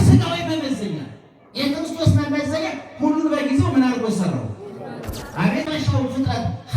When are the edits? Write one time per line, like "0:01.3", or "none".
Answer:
0:05.7